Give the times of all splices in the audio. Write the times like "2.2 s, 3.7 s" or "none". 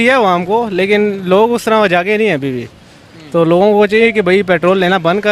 none